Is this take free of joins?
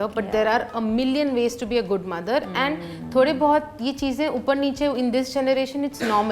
yes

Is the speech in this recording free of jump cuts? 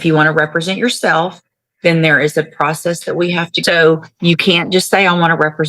no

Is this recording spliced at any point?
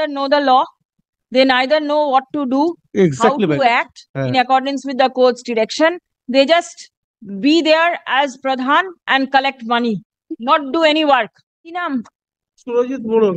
yes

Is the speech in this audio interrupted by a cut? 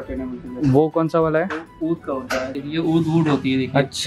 yes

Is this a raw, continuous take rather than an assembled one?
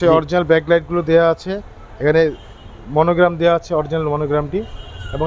yes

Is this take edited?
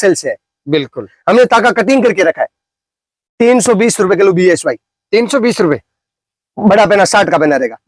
no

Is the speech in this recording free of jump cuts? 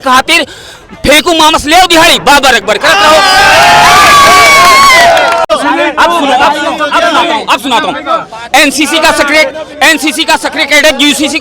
no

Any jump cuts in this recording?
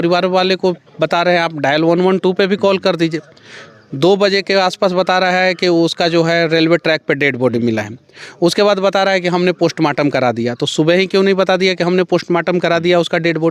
no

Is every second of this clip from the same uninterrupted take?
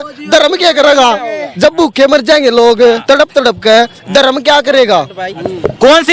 yes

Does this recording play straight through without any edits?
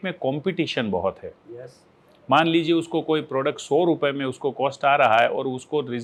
yes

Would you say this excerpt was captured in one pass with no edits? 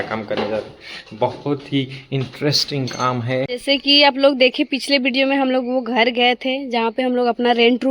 no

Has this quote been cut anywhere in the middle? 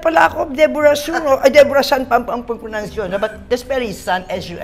no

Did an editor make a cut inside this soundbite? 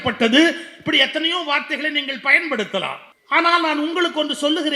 no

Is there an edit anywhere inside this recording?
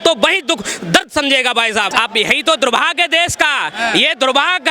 yes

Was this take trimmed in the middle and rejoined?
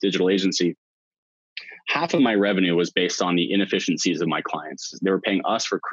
yes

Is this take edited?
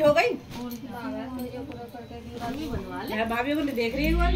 no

